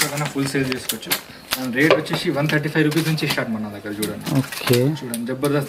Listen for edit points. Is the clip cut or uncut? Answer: uncut